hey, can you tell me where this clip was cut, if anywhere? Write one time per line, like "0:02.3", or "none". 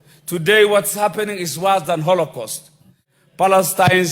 0:03.1